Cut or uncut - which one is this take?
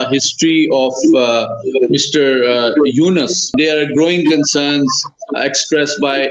cut